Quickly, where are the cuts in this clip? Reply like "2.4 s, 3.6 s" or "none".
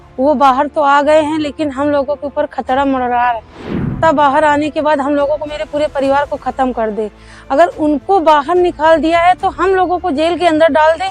4.0 s